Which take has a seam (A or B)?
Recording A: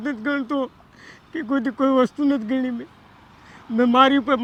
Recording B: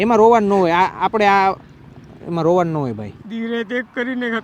B